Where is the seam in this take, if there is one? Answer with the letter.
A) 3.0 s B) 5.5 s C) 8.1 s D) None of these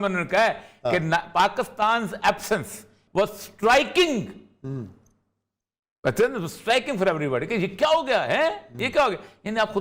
A